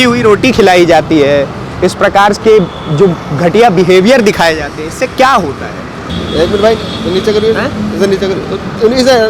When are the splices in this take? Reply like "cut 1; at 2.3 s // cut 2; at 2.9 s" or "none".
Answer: cut 1; at 6.1 s